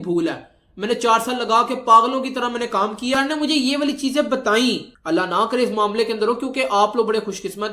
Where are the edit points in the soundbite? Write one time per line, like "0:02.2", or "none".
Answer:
0:03.1